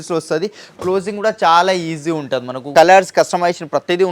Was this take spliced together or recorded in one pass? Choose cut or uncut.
cut